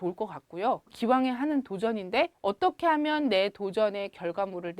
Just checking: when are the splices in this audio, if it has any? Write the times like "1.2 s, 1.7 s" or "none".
0.9 s, 2.3 s

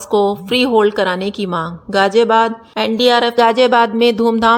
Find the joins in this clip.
2.6 s

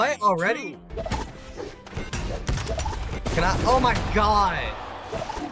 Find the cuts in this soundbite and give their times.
0.9 s

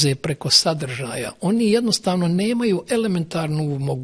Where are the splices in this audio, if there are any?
none

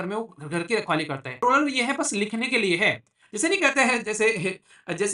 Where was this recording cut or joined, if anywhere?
1.3 s

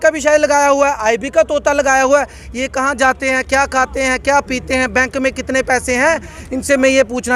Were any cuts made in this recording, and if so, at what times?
none

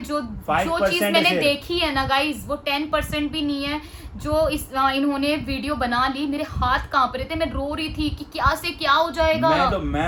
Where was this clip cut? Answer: none

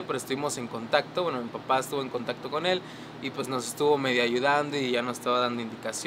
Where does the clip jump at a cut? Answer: none

